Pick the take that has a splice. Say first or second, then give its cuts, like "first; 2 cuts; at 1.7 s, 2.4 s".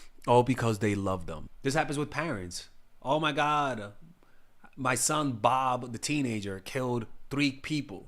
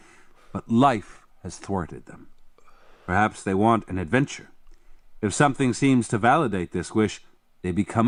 first; 1 cut; at 1.4 s